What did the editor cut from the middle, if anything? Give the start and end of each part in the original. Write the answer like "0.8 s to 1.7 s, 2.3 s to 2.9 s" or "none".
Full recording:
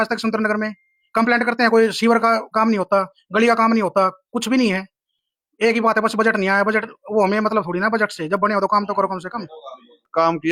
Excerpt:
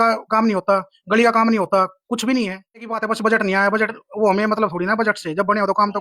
5.2 s to 5.9 s